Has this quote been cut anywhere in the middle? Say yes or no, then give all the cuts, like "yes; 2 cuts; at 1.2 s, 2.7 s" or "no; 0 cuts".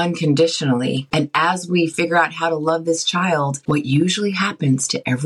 yes; 1 cut; at 1.1 s